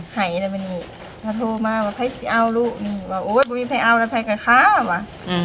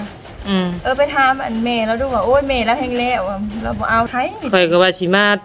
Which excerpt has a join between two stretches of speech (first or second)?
second